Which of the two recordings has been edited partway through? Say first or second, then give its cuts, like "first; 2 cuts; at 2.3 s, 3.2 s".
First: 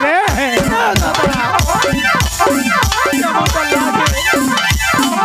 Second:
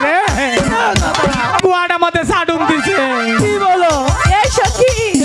second; 1 cut; at 1.6 s